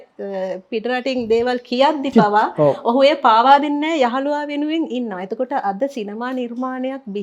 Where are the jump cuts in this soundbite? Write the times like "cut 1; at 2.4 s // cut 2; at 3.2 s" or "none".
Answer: none